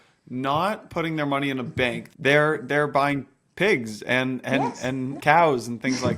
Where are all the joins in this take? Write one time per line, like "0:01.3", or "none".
0:02.0
0:05.1